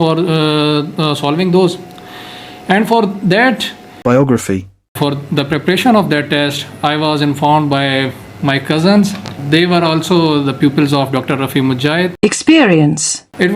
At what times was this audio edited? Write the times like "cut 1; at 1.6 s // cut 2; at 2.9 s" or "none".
cut 1; at 3.8 s // cut 2; at 4.8 s // cut 3; at 9.4 s // cut 4; at 12.1 s